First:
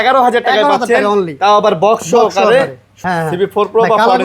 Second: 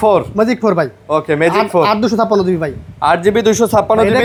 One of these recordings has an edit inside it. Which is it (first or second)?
first